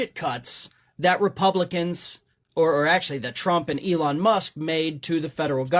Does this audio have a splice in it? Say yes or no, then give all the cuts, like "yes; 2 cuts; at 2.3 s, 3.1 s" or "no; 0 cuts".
no; 0 cuts